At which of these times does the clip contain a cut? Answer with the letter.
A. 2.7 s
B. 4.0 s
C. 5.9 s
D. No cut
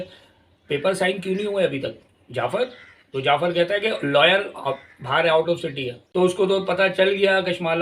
C